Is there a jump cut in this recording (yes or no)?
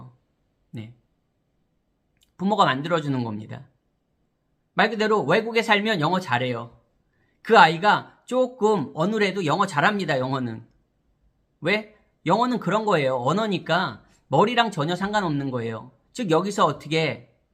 no